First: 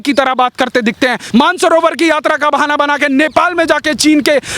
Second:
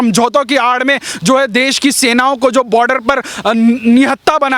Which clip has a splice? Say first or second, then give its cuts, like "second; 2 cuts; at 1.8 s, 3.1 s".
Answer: first; 1 cut; at 1.2 s